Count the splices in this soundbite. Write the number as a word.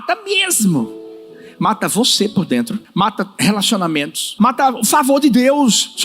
two